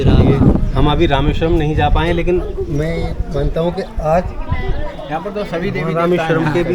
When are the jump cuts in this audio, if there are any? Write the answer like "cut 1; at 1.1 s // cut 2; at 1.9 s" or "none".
none